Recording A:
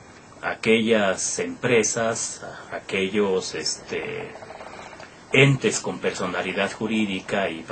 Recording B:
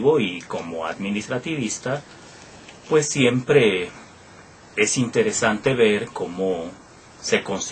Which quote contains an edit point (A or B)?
B